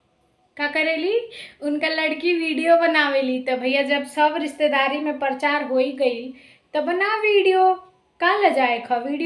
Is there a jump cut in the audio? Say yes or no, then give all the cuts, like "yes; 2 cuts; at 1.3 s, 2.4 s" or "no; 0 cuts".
no; 0 cuts